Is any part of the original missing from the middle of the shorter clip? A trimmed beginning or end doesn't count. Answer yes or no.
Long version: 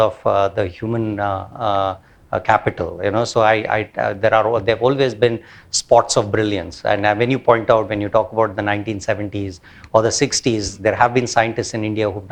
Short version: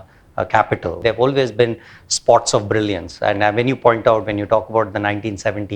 yes